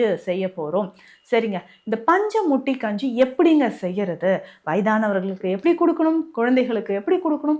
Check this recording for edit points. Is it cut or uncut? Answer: uncut